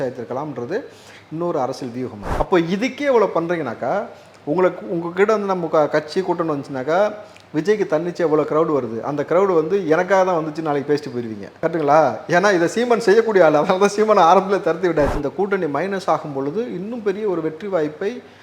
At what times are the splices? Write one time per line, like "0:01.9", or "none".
0:02.2
0:15.1